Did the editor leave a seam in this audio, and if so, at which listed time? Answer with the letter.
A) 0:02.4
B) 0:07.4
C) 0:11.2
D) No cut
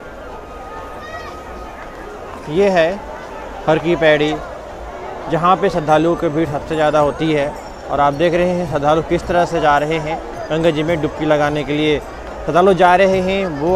D